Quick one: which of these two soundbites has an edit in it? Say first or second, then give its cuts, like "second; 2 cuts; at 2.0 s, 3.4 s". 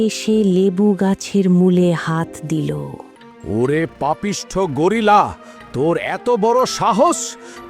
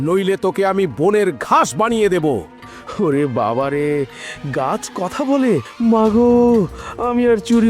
second; 1 cut; at 5.7 s